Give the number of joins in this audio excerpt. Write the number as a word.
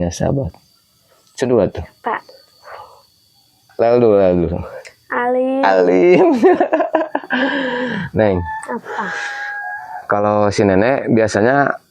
zero